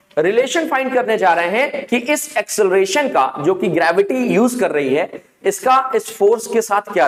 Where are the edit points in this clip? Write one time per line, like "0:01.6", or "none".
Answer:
none